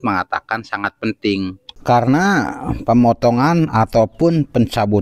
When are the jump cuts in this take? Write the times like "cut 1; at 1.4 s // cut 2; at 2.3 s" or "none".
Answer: cut 1; at 1.7 s